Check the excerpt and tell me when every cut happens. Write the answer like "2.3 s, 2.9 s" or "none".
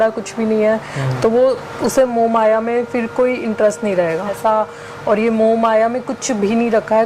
4.3 s